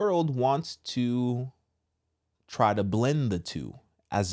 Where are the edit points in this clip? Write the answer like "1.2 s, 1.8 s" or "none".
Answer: none